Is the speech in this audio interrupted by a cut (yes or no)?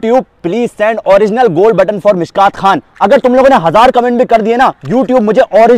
no